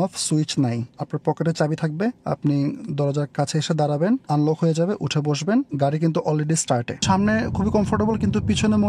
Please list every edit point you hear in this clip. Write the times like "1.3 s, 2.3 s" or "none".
0.9 s, 2.2 s, 4.2 s, 5.7 s, 7.0 s